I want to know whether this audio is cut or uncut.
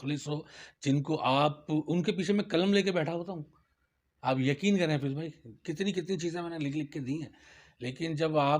uncut